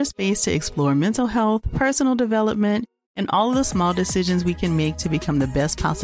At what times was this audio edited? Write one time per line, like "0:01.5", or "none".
none